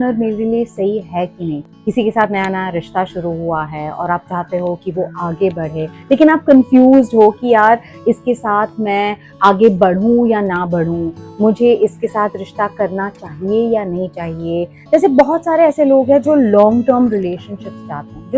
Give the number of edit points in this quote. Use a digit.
1